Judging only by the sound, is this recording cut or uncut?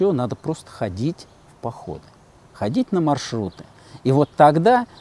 uncut